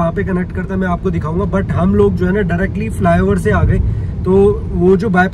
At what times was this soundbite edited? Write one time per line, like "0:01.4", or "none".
none

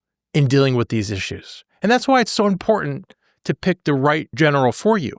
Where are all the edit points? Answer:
0:04.3

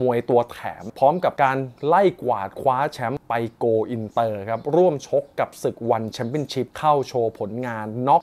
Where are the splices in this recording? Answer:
0:00.9
0:03.2

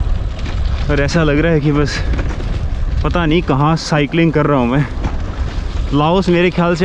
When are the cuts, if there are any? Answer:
none

